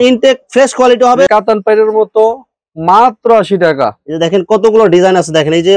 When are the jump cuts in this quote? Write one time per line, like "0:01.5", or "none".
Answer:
0:01.3

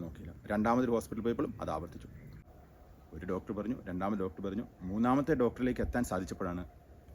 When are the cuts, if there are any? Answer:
0:02.3

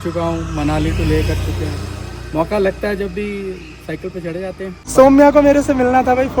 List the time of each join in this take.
0:04.8

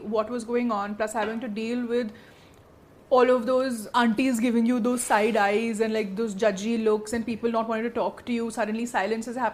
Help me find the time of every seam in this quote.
none

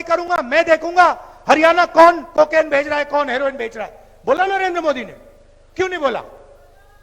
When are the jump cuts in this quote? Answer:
none

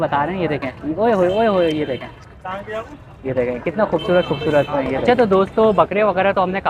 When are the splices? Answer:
0:05.0

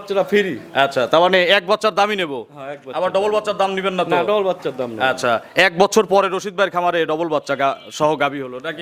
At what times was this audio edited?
none

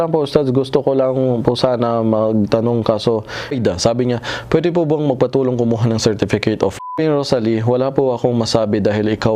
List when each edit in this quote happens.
0:03.5
0:06.9

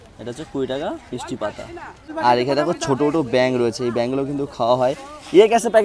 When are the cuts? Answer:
none

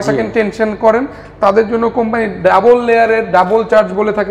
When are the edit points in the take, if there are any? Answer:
none

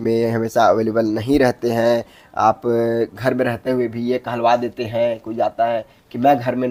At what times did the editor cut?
none

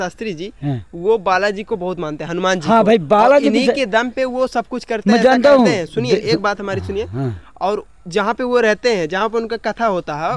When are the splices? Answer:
none

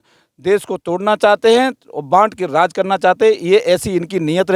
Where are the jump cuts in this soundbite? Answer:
none

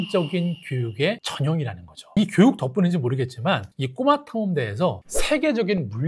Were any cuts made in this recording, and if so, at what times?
0:02.1

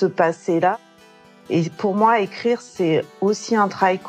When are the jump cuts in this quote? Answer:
0:01.2

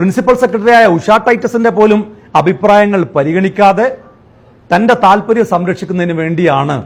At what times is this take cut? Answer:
none

